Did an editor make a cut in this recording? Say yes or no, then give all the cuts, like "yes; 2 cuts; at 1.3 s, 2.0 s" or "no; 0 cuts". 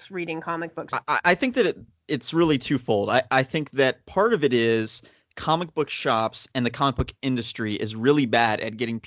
yes; 1 cut; at 1.0 s